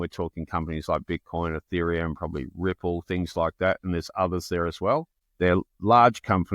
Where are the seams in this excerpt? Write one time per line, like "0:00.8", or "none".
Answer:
0:05.2